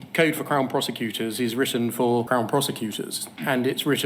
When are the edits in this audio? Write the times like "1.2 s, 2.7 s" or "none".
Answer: 2.3 s